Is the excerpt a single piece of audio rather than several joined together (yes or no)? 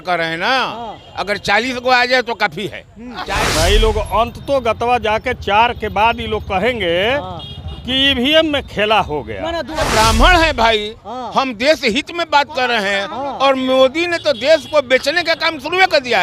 no